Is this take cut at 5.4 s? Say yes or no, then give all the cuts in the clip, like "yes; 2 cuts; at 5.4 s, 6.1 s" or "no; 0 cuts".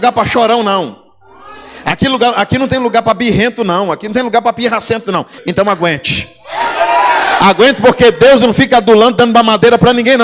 yes; 1 cut; at 5.4 s